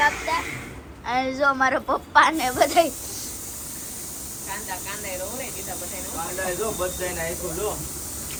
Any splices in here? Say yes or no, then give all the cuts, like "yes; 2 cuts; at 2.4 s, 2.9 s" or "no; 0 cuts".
no; 0 cuts